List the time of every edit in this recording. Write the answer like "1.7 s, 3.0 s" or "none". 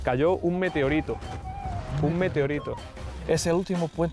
3.1 s